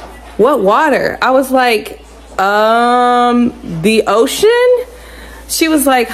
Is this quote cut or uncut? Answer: uncut